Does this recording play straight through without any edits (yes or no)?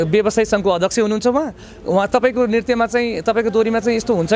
yes